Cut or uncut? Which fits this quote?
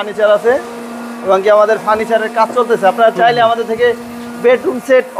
uncut